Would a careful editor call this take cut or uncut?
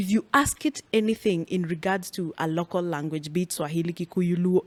uncut